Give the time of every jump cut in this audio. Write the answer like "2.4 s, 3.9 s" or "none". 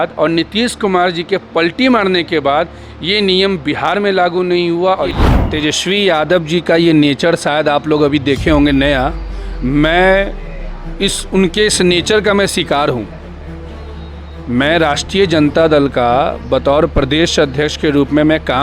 5.2 s